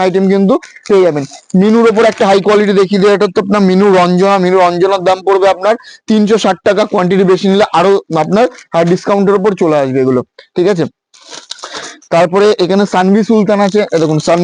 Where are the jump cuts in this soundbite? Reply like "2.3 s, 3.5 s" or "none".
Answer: none